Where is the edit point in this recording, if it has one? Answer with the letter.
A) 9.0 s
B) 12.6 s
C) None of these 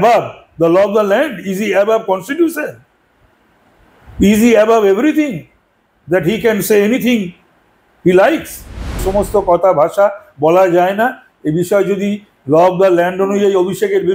A